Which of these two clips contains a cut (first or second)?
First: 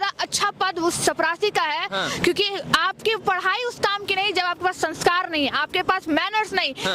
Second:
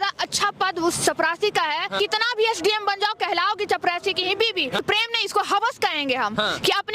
second